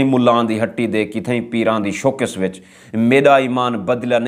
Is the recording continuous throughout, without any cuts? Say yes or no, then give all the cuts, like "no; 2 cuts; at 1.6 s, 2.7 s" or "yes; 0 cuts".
yes; 0 cuts